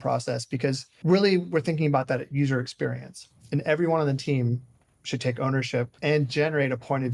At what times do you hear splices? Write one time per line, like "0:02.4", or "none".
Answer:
0:00.9
0:05.9